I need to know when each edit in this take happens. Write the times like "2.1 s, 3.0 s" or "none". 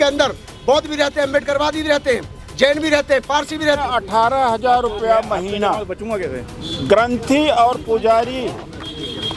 3.8 s